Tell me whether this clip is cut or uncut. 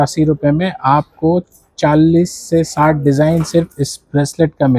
uncut